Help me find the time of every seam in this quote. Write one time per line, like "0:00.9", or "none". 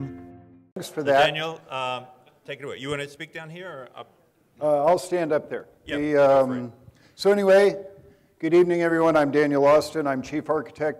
0:01.1